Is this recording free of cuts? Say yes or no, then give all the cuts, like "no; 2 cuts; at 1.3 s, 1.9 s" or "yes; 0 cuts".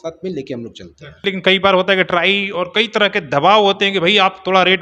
no; 1 cut; at 1.2 s